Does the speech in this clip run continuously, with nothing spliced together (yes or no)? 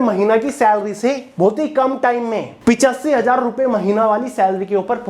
no